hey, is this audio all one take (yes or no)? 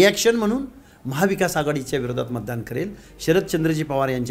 yes